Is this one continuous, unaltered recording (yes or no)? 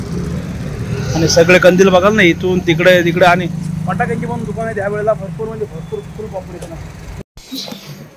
no